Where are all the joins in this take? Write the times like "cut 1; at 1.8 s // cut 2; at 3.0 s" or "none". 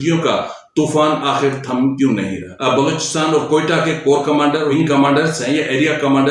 cut 1; at 2.5 s // cut 2; at 4.7 s